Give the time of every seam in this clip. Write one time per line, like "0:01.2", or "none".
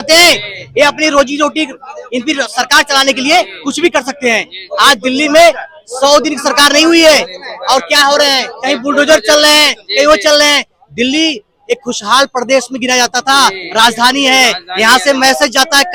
none